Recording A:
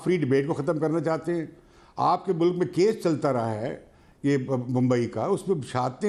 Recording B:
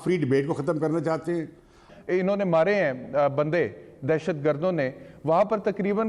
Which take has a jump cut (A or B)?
B